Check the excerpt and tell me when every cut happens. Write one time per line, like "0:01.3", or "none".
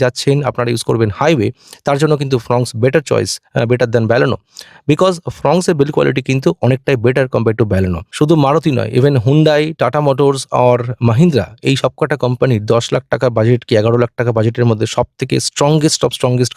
0:08.1